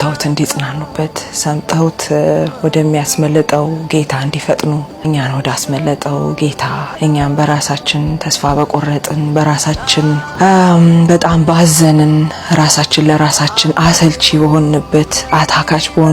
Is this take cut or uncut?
cut